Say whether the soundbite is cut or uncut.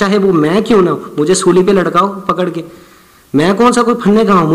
uncut